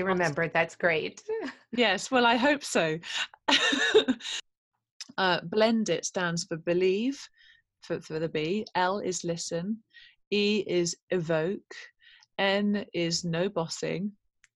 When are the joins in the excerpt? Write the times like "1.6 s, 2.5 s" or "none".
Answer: 4.5 s